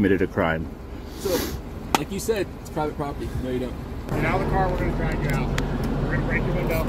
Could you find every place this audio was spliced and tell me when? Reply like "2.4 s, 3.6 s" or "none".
4.2 s